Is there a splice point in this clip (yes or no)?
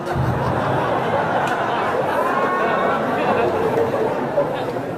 no